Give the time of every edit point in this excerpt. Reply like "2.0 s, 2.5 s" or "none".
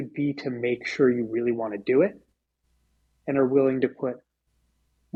none